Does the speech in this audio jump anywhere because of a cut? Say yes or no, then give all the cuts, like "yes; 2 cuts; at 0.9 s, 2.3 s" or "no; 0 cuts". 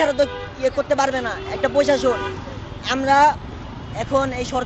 no; 0 cuts